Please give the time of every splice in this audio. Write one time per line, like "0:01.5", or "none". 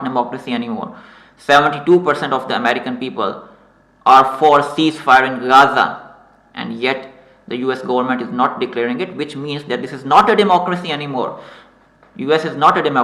none